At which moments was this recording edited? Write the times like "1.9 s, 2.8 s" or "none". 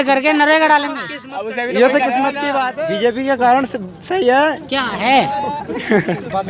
2.7 s